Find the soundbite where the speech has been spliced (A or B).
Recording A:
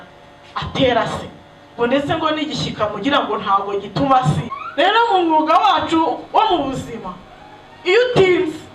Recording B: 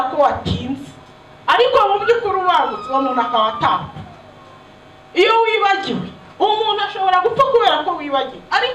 A